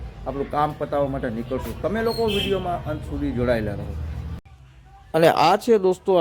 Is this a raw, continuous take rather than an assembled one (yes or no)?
yes